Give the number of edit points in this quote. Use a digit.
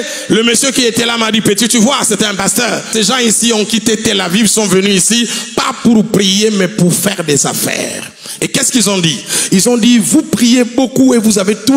1